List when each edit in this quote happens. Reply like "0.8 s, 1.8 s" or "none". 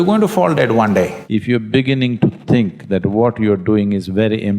1.2 s